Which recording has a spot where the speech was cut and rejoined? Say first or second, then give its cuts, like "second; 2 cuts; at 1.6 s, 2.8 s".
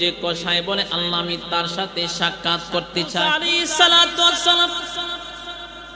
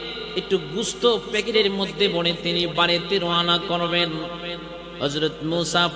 first; 1 cut; at 3.2 s